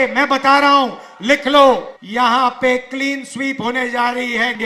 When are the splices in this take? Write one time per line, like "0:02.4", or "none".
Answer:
0:02.0